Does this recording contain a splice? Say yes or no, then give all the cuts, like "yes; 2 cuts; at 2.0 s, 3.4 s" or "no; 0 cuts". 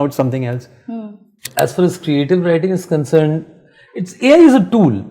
yes; 1 cut; at 1.4 s